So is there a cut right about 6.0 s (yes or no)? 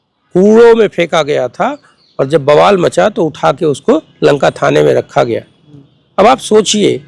no